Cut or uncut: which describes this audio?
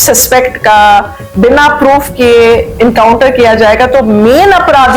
uncut